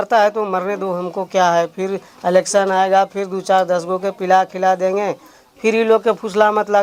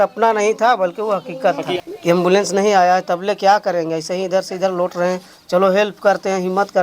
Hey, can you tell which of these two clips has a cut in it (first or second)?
second